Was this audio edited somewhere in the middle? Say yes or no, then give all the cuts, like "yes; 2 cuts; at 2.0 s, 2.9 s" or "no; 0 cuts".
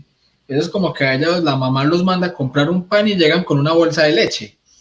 no; 0 cuts